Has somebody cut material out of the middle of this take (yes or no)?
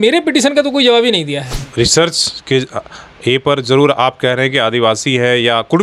yes